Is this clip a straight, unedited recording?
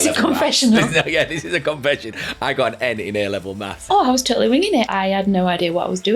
no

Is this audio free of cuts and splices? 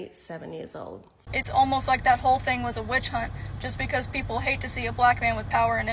no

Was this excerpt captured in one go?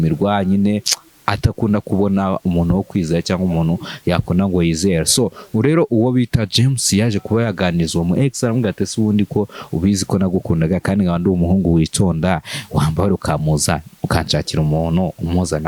yes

